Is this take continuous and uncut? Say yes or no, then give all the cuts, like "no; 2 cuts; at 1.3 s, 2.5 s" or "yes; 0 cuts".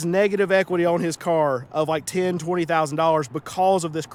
yes; 0 cuts